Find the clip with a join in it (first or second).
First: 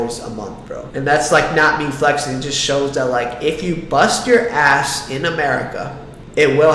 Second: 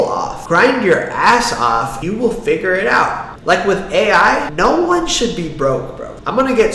second